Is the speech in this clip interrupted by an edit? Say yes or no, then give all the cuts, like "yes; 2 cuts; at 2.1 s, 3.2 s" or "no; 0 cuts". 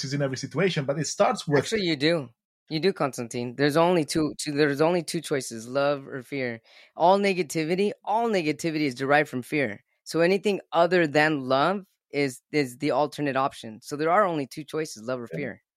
no; 0 cuts